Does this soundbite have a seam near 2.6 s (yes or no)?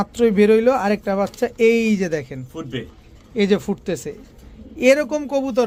no